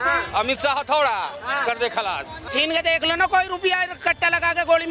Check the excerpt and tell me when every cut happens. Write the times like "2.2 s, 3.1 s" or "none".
2.5 s